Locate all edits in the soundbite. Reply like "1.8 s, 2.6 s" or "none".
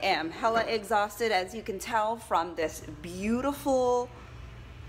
none